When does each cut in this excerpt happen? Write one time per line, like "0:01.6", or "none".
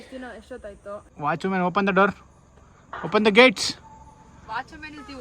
0:01.1